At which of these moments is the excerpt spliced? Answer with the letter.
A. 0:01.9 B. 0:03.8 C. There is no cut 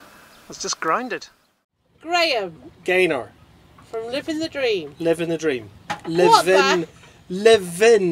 A